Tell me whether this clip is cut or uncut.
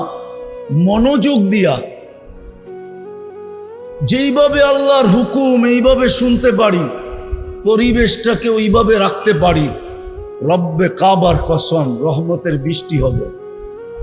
cut